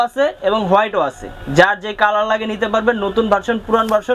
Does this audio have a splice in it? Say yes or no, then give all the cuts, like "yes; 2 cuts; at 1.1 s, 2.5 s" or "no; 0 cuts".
no; 0 cuts